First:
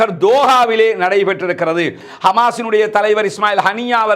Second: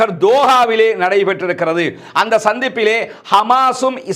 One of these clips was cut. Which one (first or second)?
first